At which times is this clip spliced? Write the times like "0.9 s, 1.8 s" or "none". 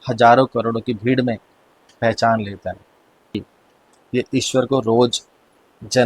3.3 s